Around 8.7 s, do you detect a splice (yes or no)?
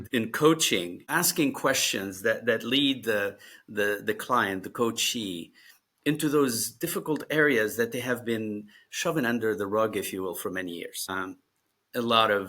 no